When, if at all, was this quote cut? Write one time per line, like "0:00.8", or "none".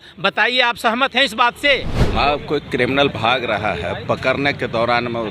0:02.0